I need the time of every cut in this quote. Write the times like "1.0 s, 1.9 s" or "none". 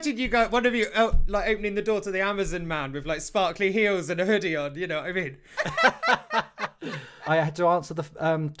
7.2 s